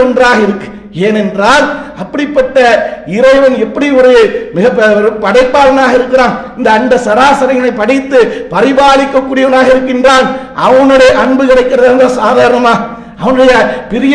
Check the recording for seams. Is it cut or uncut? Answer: uncut